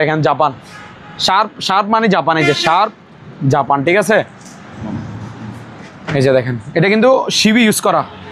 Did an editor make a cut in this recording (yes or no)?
no